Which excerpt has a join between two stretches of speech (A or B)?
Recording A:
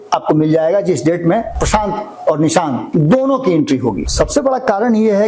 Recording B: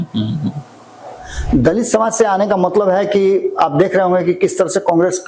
A